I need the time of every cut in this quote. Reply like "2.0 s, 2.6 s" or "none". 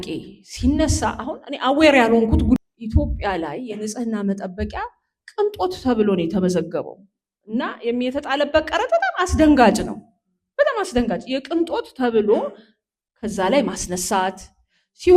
2.6 s